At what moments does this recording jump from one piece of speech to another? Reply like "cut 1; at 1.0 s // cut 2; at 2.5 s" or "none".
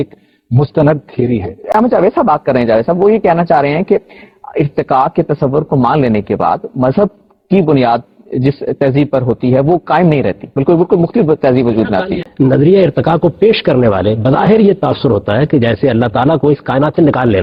none